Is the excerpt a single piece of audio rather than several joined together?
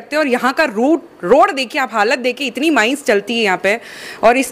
yes; 0 cuts

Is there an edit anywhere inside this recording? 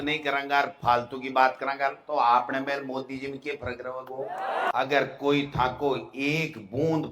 yes; 1 cut; at 4.7 s

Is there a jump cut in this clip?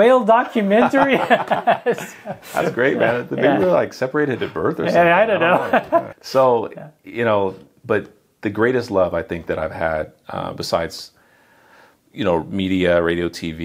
no; 0 cuts

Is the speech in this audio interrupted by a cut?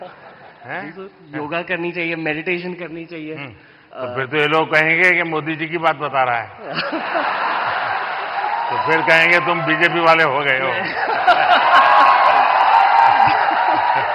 no; 0 cuts

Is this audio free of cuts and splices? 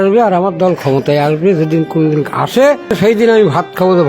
no; 1 cut; at 2.9 s

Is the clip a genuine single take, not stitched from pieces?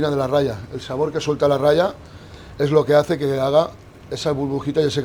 yes; 0 cuts

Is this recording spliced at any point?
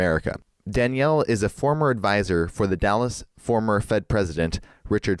no; 0 cuts

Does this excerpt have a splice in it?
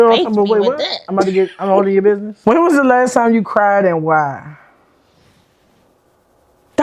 yes; 1 cut; at 2.3 s

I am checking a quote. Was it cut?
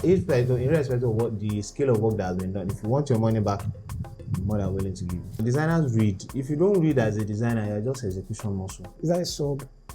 yes; 2 cuts; at 5.4 s, 8.9 s

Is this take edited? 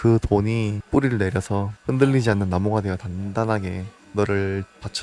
no; 0 cuts

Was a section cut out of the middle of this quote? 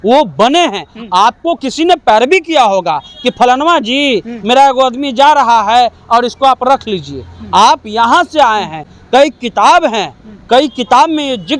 no; 0 cuts

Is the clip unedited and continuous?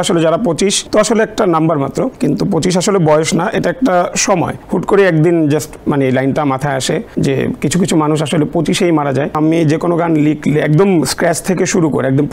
no; 5 cuts; at 0.8 s, 2.1 s, 4.6 s, 7.1 s, 9.3 s

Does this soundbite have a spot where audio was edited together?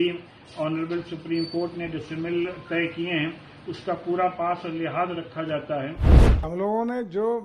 yes; 1 cut; at 6.1 s

